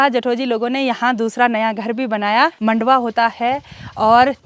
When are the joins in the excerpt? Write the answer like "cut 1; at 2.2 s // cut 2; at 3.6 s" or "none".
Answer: cut 1; at 2.6 s